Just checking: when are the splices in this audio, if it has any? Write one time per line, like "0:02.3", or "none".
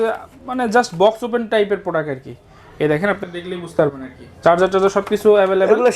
none